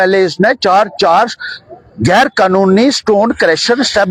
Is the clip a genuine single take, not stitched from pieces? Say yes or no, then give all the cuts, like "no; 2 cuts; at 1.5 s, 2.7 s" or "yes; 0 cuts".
yes; 0 cuts